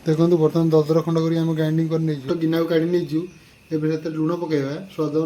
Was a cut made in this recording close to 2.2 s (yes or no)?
yes